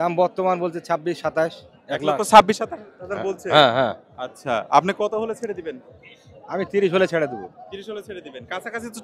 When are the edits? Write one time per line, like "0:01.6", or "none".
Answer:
none